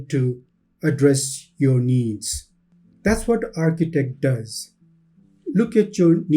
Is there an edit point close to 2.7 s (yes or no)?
no